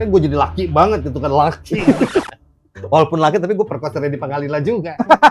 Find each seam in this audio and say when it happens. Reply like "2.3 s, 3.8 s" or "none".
none